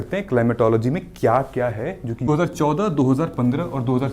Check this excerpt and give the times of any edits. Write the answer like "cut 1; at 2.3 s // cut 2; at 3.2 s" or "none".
cut 1; at 2.3 s